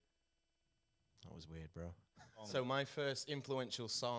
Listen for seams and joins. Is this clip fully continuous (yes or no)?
no